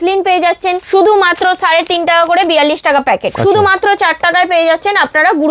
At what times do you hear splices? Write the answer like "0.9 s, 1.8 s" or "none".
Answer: 0.8 s, 3.3 s